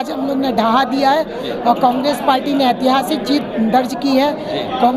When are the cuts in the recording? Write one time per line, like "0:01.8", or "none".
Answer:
none